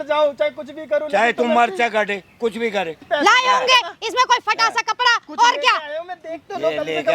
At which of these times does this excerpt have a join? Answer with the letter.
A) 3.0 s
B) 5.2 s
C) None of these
A